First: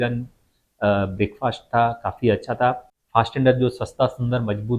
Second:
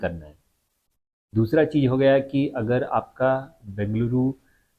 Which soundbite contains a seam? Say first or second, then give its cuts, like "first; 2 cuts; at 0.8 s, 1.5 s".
first; 1 cut; at 2.9 s